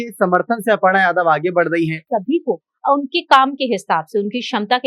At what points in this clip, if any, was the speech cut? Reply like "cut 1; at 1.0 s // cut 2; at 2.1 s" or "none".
cut 1; at 2.0 s

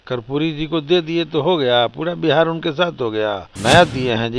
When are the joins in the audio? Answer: cut 1; at 3.5 s

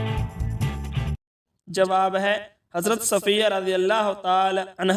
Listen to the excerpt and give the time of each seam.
none

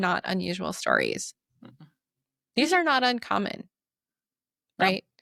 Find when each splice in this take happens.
none

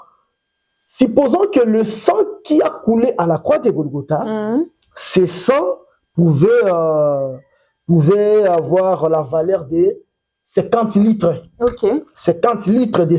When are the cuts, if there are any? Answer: none

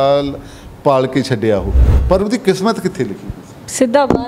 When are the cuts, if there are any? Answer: cut 1; at 1.9 s

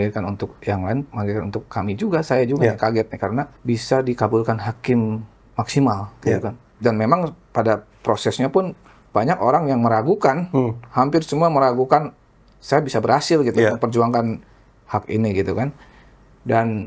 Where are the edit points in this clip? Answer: cut 1; at 3.5 s // cut 2; at 6.6 s

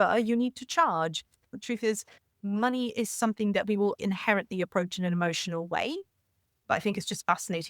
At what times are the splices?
cut 1; at 1.4 s // cut 2; at 4.0 s // cut 3; at 6.6 s

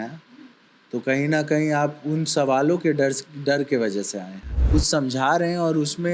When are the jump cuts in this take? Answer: cut 1; at 4.5 s

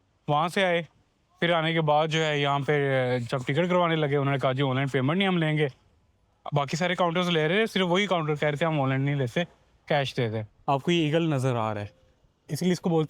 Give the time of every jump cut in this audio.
cut 1; at 10.5 s

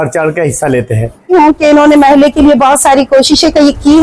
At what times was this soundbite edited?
cut 1; at 1.3 s

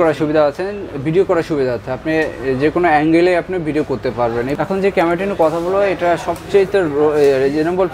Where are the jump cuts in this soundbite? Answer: cut 1; at 4.6 s

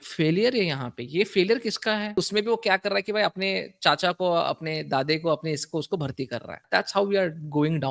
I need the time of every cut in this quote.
cut 1; at 2.2 s // cut 2; at 6.6 s

